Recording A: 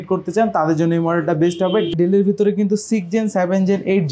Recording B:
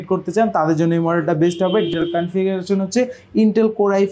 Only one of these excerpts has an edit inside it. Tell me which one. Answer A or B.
A